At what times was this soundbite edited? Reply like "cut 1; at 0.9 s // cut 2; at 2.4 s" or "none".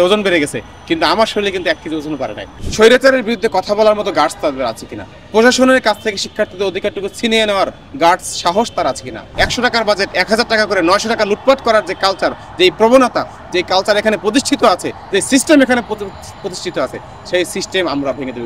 cut 1; at 2.6 s // cut 2; at 9.3 s

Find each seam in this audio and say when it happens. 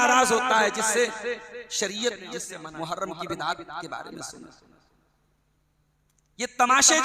cut 1; at 2.5 s

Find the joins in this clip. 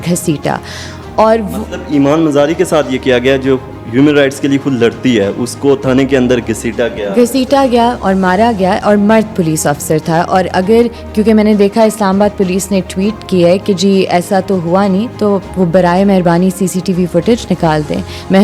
none

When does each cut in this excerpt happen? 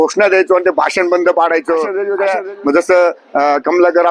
cut 1; at 2.0 s

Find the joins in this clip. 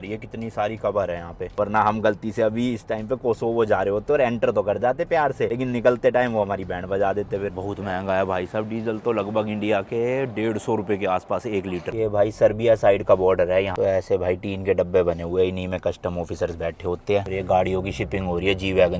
cut 1; at 1.6 s // cut 2; at 7.5 s // cut 3; at 11.8 s // cut 4; at 13.7 s // cut 5; at 17.3 s

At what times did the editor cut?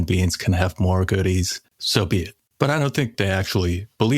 cut 1; at 2.0 s // cut 2; at 3.1 s

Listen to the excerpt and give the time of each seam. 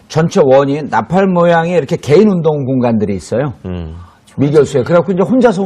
none

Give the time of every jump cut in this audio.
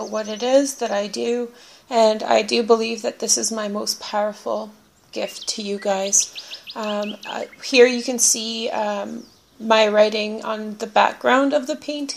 none

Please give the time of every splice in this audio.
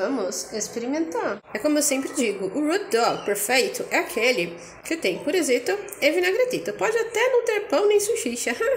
cut 1; at 1.4 s

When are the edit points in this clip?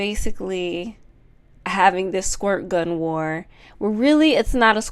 none

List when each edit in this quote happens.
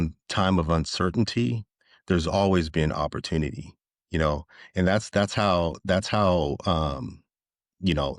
none

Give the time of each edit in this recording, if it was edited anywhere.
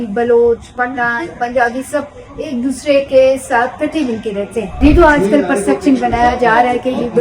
cut 1; at 4.8 s

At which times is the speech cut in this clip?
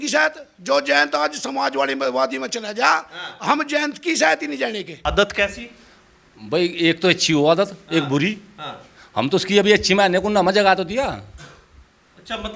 cut 1; at 4.9 s

